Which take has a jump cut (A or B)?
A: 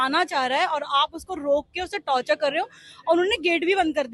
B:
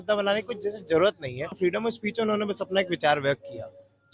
B